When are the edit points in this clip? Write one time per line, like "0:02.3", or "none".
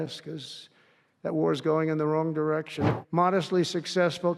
0:02.8